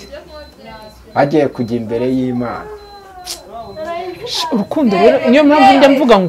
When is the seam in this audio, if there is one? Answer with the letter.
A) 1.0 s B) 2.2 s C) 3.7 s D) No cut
D